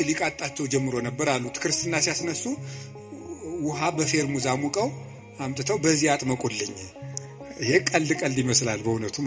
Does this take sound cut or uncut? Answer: uncut